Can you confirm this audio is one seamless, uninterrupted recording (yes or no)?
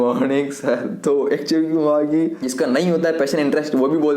no